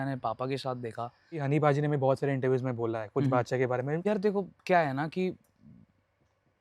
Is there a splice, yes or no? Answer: yes